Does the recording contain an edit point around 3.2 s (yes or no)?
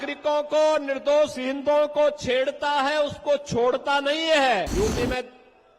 no